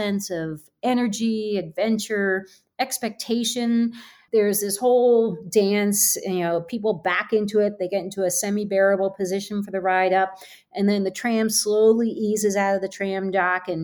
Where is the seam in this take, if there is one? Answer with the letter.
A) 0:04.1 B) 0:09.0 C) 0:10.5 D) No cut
A